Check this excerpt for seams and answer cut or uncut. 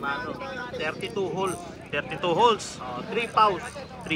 uncut